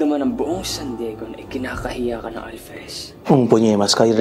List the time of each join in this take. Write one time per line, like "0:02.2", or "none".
0:03.2